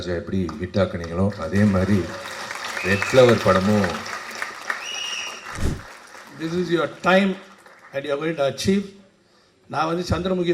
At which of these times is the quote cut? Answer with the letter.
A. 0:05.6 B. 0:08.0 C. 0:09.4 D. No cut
A